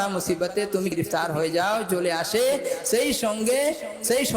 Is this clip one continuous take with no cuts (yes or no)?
no